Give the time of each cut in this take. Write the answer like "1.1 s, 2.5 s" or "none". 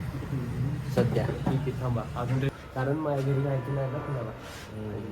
2.5 s